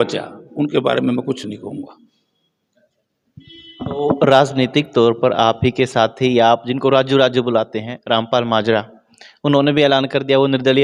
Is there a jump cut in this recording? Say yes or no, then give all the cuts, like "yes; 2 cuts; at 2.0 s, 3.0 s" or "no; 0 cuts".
no; 0 cuts